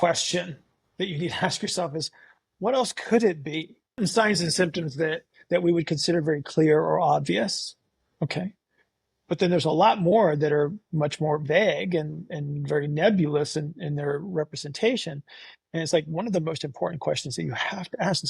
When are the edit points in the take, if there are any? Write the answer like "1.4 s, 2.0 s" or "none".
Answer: 4.0 s

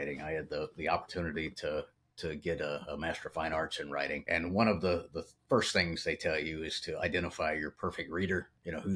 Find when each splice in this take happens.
4.2 s

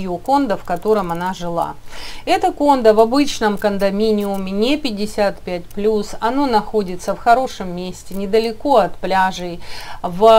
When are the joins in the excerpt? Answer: none

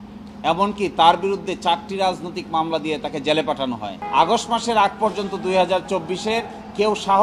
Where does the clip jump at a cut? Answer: 4.0 s

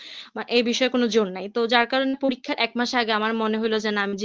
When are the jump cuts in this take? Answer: none

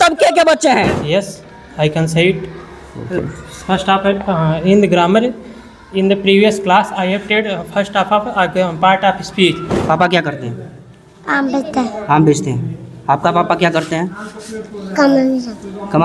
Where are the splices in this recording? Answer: 1.0 s, 9.7 s

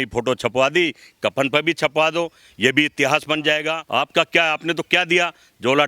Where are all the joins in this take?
3.8 s

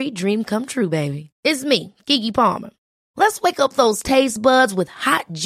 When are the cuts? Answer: none

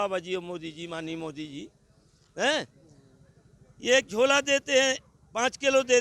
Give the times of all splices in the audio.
none

